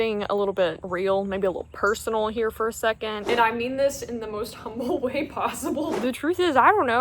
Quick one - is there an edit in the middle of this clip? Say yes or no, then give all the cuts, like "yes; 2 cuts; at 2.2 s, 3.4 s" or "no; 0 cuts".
yes; 2 cuts; at 3.2 s, 5.9 s